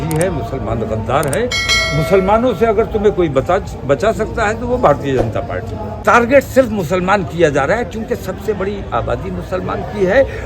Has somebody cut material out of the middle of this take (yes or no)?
yes